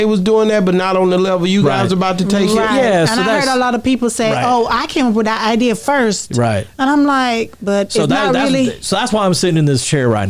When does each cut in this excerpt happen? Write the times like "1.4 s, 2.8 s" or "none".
none